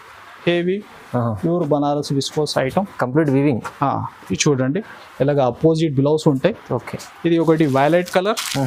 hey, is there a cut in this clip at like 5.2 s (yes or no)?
no